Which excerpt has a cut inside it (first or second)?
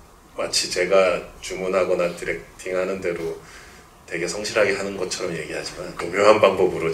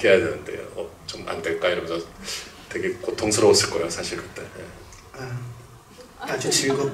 first